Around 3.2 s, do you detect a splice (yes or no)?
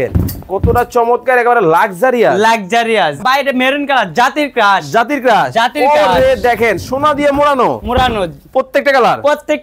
yes